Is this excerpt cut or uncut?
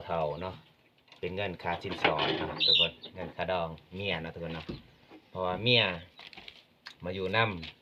uncut